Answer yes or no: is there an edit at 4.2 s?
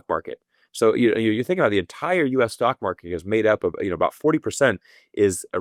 no